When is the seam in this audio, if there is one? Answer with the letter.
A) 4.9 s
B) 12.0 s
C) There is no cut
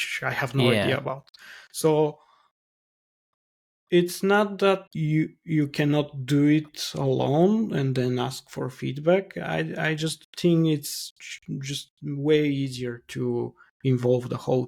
A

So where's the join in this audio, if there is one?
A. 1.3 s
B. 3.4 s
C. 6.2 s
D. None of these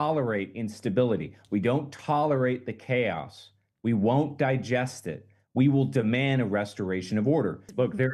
D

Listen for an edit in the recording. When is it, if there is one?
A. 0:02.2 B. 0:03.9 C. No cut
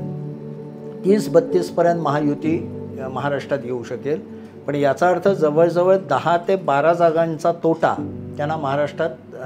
C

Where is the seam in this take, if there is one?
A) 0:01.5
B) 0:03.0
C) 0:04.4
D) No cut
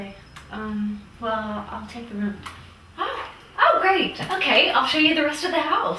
A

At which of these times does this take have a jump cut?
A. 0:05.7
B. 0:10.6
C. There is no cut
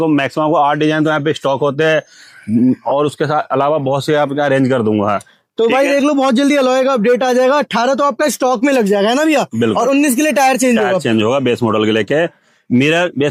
C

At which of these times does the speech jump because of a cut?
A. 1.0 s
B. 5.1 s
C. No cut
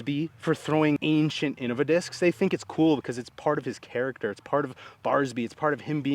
A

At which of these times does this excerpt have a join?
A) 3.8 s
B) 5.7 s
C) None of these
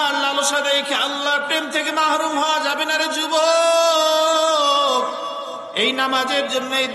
B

